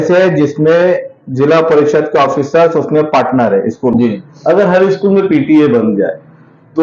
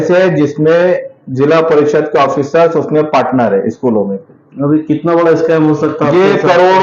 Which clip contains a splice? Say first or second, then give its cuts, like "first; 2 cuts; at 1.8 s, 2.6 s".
first; 1 cut; at 3.9 s